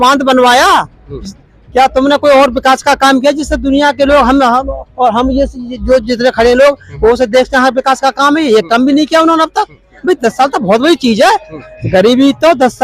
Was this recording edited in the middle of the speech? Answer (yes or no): no